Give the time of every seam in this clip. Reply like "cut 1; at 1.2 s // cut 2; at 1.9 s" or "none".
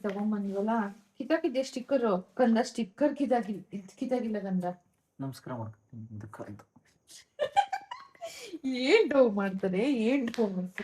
cut 1; at 7.1 s